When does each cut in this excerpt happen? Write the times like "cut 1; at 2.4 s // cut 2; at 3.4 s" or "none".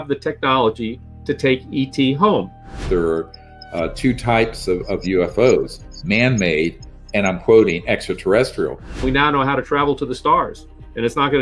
cut 1; at 2.8 s // cut 2; at 9.0 s

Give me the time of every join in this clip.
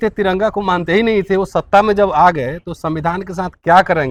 none

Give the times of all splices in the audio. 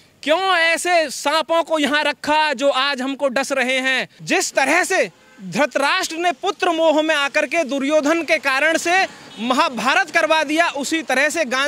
cut 1; at 4.1 s

